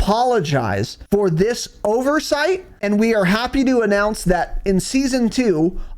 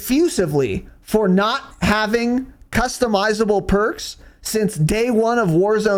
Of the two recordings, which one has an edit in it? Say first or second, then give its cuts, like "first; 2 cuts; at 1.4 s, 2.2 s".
first; 2 cuts; at 0.9 s, 2.7 s